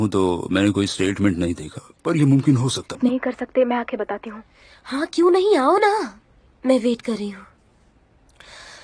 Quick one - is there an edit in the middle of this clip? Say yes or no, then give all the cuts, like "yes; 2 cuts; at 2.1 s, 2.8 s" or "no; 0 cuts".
yes; 1 cut; at 3.0 s